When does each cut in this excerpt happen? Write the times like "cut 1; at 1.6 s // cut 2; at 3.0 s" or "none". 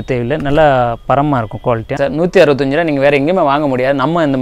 cut 1; at 1.9 s